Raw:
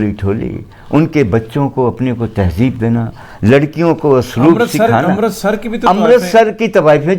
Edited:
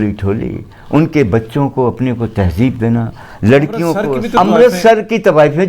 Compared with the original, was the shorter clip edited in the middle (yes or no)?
yes